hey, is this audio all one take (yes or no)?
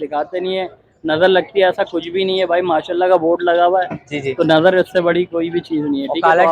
yes